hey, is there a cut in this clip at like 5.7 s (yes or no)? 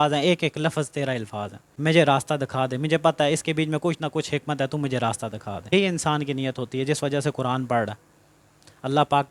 yes